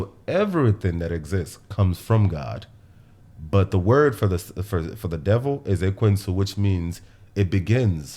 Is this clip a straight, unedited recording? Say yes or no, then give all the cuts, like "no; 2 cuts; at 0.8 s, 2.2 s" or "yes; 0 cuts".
yes; 0 cuts